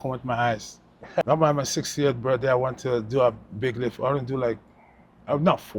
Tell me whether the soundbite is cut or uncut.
cut